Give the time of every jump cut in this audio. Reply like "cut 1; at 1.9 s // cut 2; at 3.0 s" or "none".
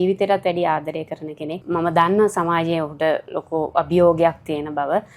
cut 1; at 1.5 s